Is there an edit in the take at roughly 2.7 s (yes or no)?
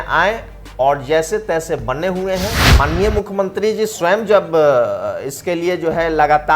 yes